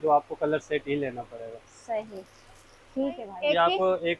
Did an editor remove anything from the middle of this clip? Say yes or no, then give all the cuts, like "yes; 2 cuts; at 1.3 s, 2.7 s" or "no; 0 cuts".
yes; 1 cut; at 3.3 s